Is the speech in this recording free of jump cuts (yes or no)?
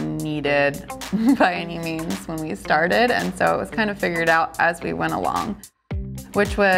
no